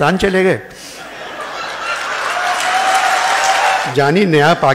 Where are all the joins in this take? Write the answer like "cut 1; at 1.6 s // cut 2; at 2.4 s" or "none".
cut 1; at 3.9 s